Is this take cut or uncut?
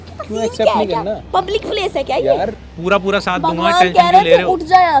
cut